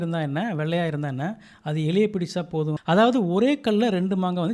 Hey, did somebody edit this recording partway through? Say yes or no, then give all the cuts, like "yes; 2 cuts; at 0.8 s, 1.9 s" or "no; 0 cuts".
yes; 1 cut; at 2.8 s